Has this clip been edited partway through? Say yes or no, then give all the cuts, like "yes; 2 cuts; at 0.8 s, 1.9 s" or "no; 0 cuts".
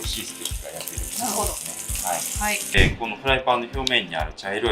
yes; 1 cut; at 2.6 s